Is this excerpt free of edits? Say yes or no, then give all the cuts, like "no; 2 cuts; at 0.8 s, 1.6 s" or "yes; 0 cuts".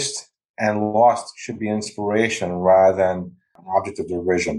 no; 1 cut; at 3.5 s